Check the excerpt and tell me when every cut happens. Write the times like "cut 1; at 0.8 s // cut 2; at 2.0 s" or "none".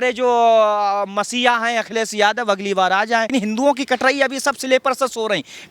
cut 1; at 3.3 s